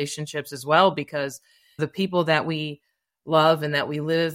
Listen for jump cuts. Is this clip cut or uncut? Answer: cut